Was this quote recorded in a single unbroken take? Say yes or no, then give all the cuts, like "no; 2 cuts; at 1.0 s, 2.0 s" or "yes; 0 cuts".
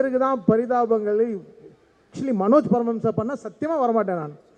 no; 1 cut; at 2.1 s